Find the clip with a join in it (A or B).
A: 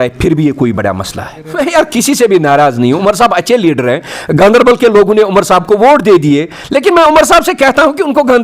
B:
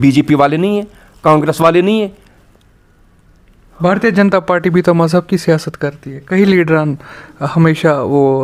A